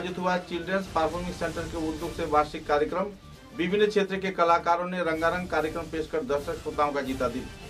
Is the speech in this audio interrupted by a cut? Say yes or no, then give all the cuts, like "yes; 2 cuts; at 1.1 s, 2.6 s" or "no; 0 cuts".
no; 0 cuts